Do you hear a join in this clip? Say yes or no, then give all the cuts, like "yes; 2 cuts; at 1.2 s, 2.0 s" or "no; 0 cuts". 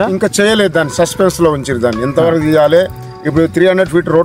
no; 0 cuts